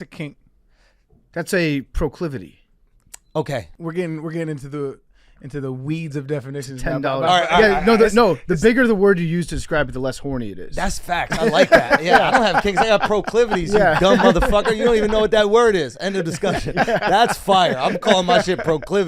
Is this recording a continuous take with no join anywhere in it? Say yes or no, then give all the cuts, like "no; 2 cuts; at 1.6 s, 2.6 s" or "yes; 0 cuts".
no; 1 cut; at 3.7 s